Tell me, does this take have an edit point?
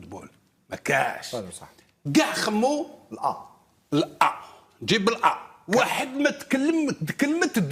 yes; 1 cut; at 5.5 s

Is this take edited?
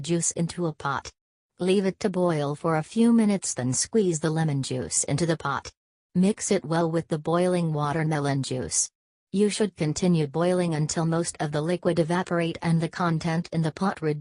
no; 0 cuts

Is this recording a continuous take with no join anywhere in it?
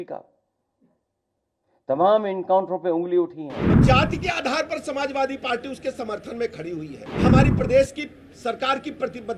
no; 2 cuts; at 3.8 s, 7.1 s

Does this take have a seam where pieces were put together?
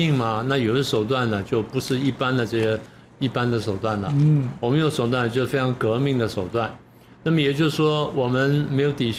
no; 0 cuts

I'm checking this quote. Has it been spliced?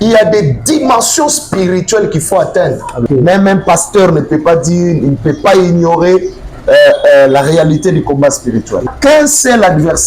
yes; 2 cuts; at 3.0 s, 8.9 s

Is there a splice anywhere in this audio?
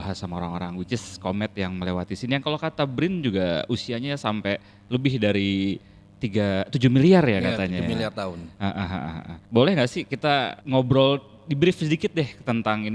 yes; 1 cut; at 10.6 s

